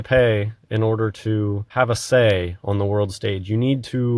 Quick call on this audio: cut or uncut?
cut